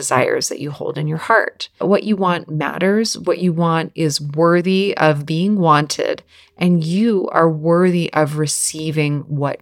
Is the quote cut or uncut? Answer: cut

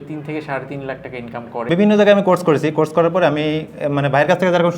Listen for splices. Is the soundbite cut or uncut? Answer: cut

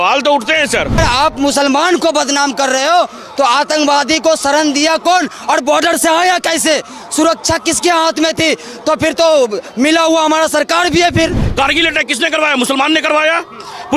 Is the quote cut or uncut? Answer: cut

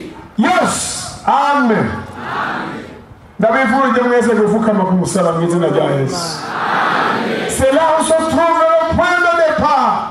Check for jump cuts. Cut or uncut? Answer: uncut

